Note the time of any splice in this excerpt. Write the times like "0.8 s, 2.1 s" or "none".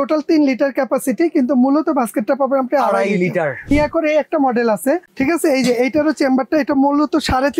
3.7 s, 5.1 s